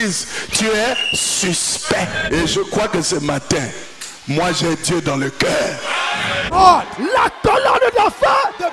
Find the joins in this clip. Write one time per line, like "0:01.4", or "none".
0:02.3
0:06.5